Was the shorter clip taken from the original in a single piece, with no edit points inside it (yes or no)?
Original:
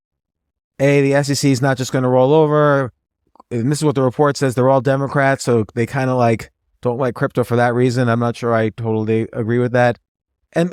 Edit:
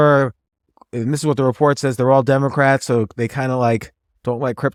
yes